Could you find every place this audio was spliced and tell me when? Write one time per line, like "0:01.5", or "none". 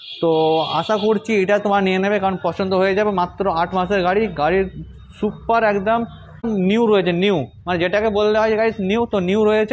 0:06.5